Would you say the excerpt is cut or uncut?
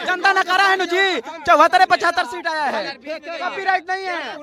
uncut